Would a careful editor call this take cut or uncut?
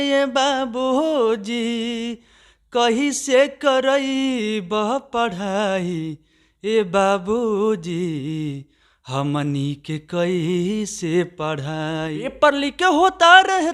cut